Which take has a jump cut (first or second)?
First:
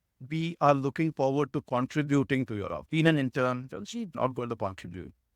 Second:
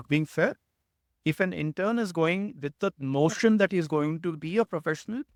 first